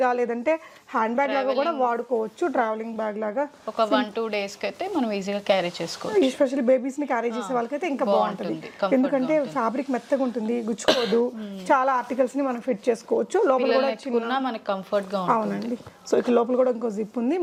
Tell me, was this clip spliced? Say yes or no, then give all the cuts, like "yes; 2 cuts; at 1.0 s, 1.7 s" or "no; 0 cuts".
no; 0 cuts